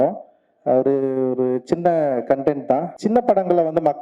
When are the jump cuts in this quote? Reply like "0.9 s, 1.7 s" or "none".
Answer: 2.9 s

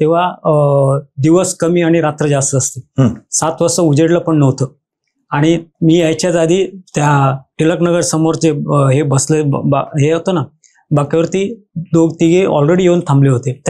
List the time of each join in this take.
none

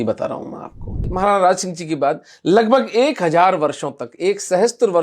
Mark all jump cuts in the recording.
1.0 s

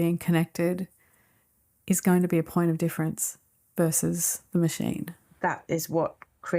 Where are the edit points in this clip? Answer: 5.2 s

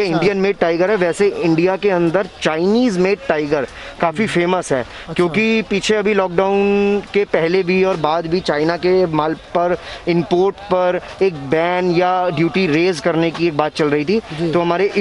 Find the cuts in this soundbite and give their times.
none

